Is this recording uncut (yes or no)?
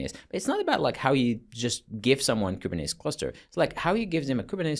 yes